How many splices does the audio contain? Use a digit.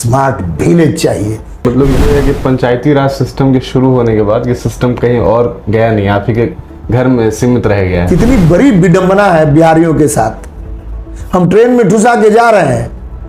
2